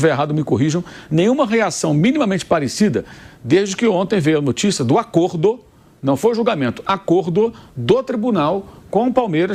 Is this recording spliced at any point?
no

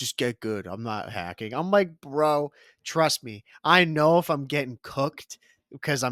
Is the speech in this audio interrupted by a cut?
no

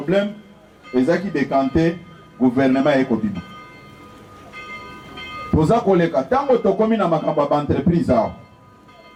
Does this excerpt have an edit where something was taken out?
no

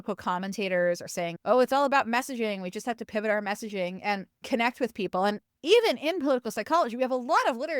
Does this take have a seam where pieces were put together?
yes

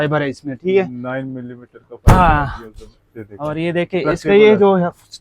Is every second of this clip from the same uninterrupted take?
yes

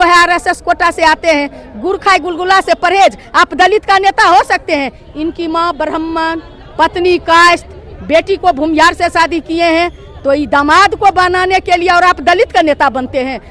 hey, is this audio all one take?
yes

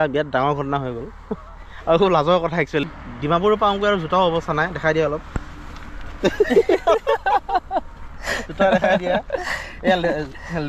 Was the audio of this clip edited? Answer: yes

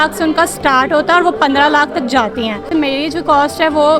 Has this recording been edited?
yes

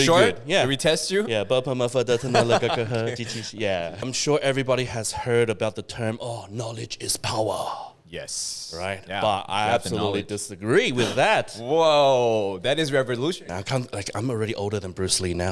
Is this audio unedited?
no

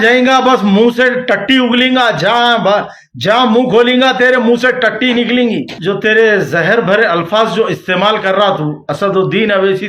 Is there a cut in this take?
yes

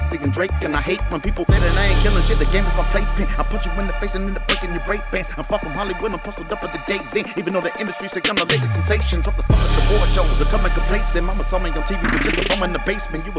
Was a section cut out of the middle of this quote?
no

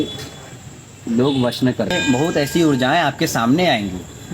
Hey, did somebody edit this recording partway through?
yes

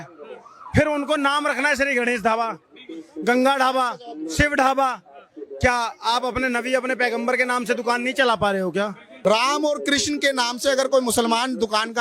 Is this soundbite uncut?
no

